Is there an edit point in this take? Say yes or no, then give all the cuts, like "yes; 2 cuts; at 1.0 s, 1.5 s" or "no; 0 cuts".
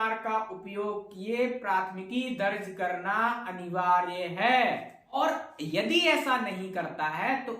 yes; 1 cut; at 5.2 s